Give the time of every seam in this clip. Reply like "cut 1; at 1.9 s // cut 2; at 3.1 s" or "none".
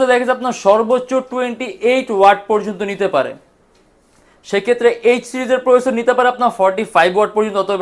none